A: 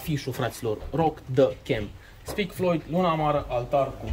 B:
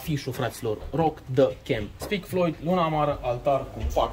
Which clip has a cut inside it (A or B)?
B